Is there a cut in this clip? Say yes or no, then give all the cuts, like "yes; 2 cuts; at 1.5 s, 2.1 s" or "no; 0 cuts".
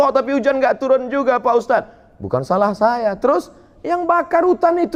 no; 0 cuts